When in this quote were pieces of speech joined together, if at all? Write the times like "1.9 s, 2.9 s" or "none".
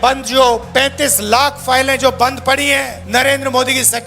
3.0 s